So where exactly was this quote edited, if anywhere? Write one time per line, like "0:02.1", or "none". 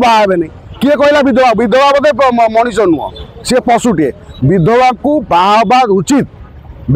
none